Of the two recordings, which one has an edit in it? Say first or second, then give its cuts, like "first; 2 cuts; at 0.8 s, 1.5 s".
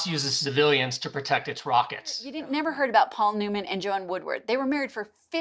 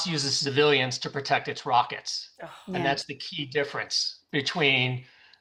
first; 1 cut; at 2.3 s